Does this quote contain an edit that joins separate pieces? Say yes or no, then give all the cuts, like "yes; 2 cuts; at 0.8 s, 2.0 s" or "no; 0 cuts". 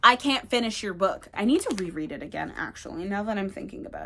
yes; 1 cut; at 1.3 s